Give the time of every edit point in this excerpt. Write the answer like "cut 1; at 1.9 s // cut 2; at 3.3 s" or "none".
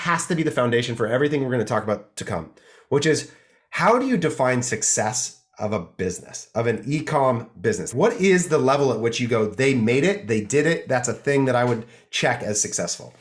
cut 1; at 7.9 s